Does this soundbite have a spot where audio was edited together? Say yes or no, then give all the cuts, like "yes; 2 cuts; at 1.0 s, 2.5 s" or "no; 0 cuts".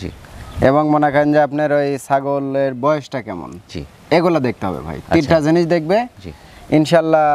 no; 0 cuts